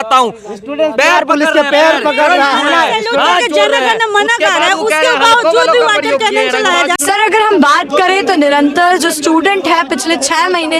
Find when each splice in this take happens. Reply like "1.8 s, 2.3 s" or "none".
none